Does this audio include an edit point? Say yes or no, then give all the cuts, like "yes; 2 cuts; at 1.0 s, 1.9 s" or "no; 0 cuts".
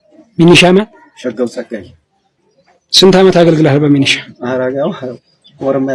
no; 0 cuts